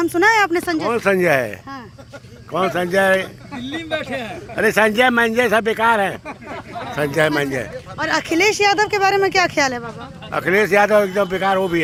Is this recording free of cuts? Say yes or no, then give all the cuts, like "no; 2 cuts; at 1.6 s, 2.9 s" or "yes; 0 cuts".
yes; 0 cuts